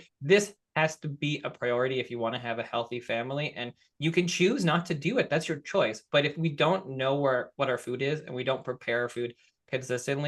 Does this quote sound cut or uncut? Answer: uncut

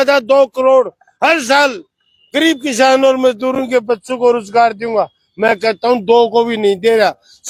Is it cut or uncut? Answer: uncut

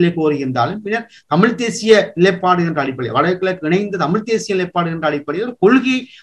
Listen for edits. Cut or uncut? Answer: uncut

